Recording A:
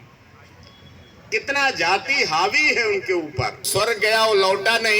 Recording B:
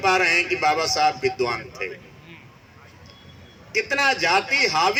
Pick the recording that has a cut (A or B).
A